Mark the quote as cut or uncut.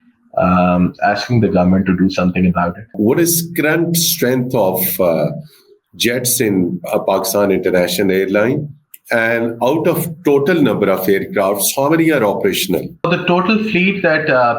cut